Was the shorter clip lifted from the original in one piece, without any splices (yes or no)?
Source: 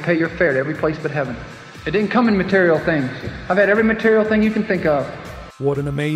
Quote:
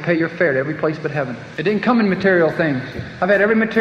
no